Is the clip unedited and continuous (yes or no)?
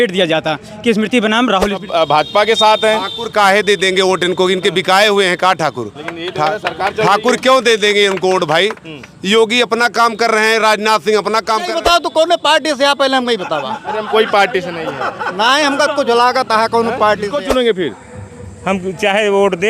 no